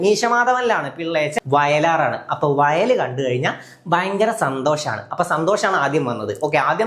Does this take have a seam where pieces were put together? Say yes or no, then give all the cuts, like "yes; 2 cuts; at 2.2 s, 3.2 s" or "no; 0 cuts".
yes; 1 cut; at 1.3 s